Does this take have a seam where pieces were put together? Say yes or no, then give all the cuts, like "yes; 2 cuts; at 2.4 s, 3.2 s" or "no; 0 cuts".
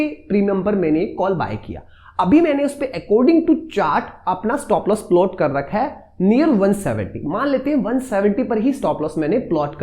no; 0 cuts